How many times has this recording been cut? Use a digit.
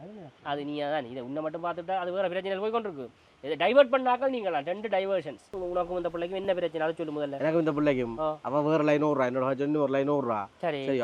1